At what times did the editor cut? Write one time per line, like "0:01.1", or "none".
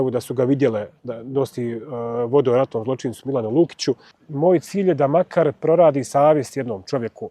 0:04.2